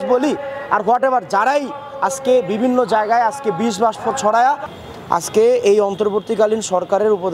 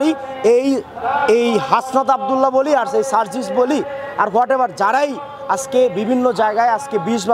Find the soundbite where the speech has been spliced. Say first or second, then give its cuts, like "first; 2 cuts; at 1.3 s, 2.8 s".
first; 1 cut; at 4.8 s